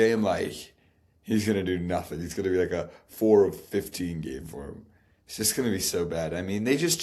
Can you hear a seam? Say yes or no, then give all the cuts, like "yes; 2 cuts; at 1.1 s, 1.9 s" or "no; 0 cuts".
no; 0 cuts